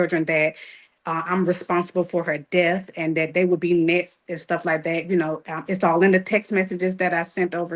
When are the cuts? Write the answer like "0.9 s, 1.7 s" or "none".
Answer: none